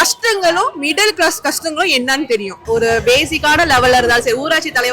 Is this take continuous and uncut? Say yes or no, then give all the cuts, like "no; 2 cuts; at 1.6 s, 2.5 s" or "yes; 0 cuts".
no; 1 cut; at 2.5 s